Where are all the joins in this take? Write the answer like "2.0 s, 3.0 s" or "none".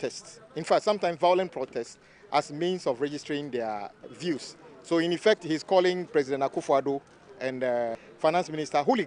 4.0 s, 8.0 s